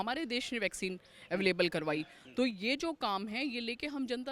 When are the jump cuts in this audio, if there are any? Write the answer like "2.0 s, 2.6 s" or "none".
none

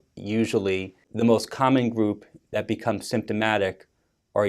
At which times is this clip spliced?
1.0 s

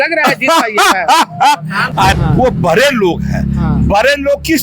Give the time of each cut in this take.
2.1 s

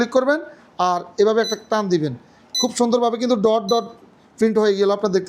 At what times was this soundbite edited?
none

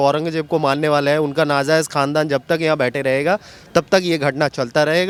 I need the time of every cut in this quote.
none

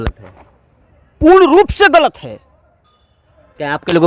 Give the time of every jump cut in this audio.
none

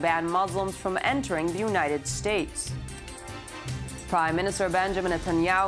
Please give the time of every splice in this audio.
4.3 s

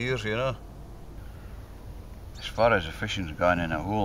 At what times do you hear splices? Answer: 1.2 s

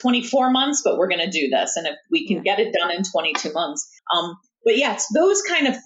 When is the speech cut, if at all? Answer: 3.9 s

